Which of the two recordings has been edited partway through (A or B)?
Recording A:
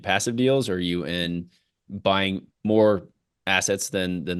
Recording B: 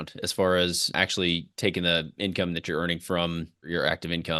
B